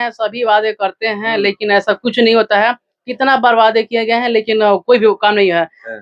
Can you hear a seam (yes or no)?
no